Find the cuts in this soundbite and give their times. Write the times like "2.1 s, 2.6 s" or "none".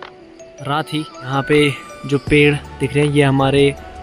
1.3 s